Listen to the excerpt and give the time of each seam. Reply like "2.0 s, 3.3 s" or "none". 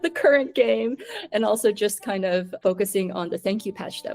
2.5 s